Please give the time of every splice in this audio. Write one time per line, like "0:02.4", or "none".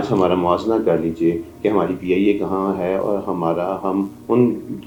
none